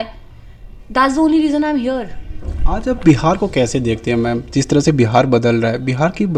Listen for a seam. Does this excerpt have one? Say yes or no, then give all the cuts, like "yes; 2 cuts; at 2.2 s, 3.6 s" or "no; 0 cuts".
no; 0 cuts